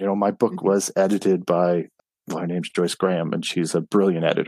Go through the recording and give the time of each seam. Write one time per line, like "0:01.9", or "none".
0:01.9